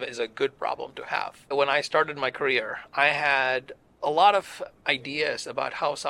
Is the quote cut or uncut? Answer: cut